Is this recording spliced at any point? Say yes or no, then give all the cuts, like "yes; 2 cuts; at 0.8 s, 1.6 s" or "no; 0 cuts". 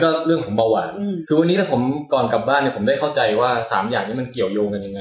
yes; 1 cut; at 1.2 s